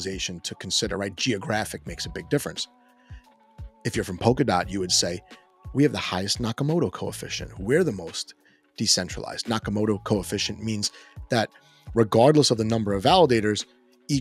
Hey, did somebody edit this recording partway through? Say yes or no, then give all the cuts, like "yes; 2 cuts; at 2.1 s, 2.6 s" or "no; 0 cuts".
no; 0 cuts